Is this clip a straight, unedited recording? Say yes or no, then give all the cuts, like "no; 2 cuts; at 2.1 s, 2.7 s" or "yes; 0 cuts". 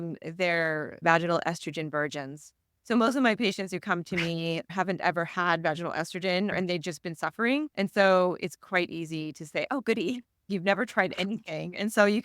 no; 4 cuts; at 1.0 s, 4.7 s, 6.5 s, 7.7 s